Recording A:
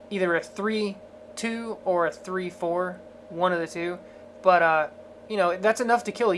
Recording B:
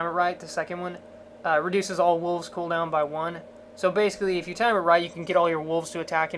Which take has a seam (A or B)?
A